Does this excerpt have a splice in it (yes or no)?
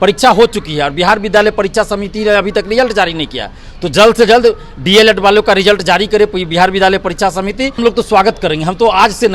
yes